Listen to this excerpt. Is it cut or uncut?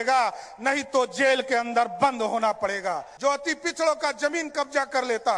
cut